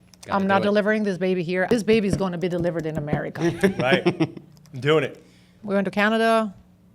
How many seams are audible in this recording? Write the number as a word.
two